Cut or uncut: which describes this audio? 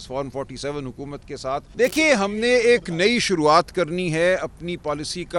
cut